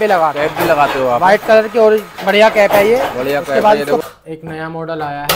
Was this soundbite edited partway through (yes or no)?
yes